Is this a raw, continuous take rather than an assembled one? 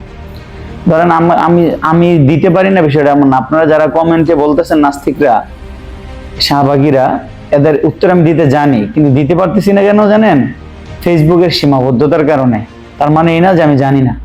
yes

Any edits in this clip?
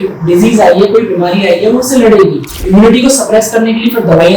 yes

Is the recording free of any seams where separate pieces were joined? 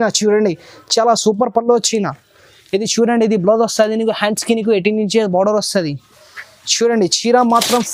yes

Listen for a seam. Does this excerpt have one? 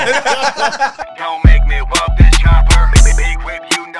yes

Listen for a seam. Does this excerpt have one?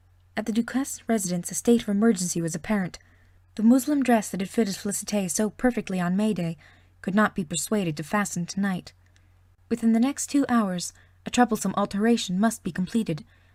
no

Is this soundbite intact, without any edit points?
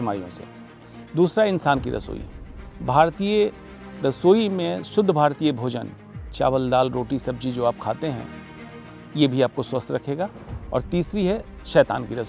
yes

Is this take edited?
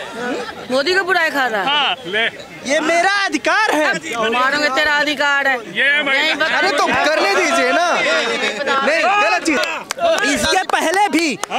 yes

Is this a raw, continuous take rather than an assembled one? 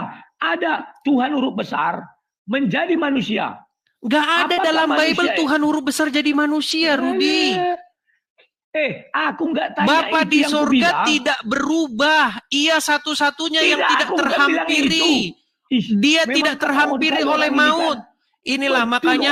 yes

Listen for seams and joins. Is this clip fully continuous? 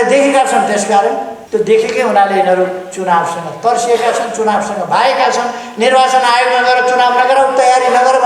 no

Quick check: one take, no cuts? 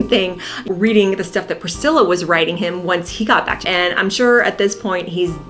no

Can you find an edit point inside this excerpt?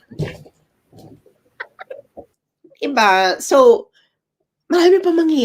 yes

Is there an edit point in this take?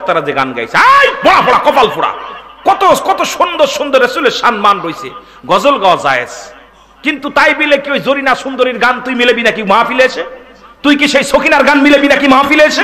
no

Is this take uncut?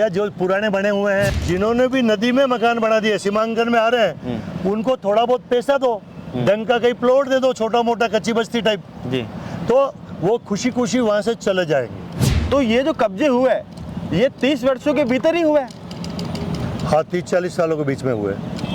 no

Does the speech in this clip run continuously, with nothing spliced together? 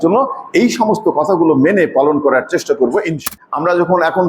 no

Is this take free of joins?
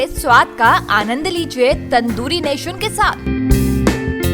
yes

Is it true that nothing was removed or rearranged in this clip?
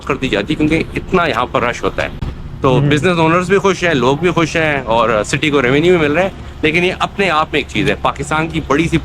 yes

